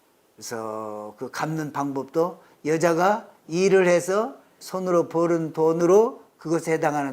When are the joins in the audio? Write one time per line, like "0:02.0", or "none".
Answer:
0:04.6
0:05.8